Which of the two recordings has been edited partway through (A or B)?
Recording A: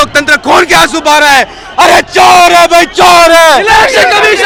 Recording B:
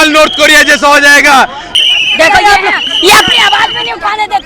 B